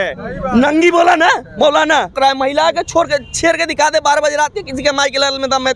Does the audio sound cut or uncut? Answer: cut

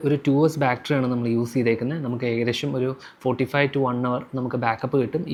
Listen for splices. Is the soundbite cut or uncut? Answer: uncut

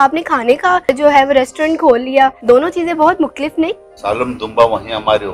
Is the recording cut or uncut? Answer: cut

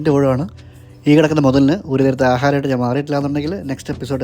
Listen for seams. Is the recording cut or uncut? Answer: uncut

